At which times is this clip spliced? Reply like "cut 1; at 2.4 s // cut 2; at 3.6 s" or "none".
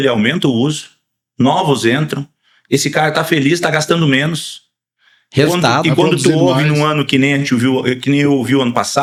none